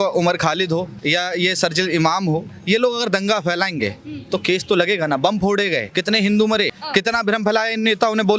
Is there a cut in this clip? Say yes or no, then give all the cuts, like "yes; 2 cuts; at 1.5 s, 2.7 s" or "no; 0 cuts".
yes; 4 cuts; at 0.9 s, 2.5 s, 5.9 s, 6.8 s